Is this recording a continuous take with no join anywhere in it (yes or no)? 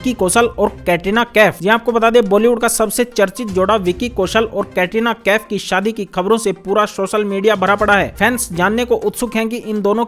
yes